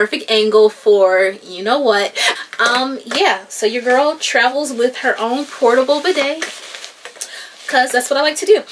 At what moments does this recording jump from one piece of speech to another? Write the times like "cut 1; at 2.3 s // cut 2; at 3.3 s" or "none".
cut 1; at 2.3 s